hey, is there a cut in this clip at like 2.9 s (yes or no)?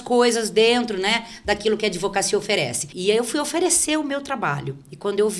yes